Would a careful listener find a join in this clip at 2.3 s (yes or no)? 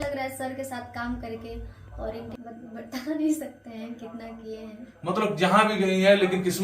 yes